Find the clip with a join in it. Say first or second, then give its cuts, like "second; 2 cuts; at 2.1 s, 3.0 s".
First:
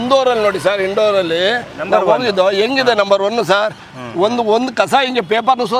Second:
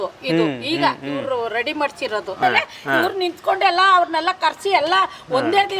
second; 1 cut; at 2.3 s